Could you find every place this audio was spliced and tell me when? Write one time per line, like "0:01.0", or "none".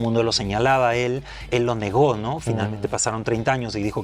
none